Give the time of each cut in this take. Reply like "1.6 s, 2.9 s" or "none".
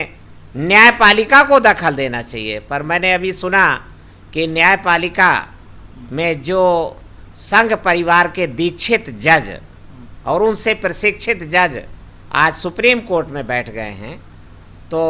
none